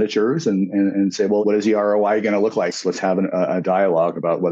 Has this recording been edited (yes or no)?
yes